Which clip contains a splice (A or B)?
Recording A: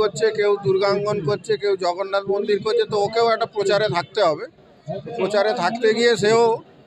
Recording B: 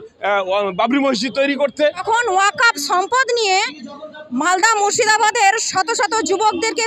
B